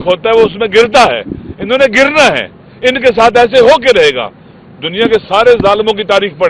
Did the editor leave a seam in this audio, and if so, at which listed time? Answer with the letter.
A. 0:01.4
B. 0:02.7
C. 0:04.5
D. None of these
D